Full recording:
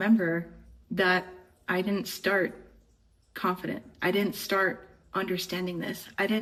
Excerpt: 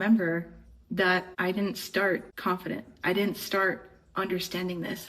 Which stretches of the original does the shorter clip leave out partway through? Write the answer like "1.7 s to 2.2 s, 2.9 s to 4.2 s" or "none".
1.3 s to 1.6 s, 2.6 s to 3.3 s